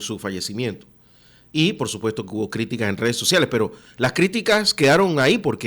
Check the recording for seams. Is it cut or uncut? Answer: uncut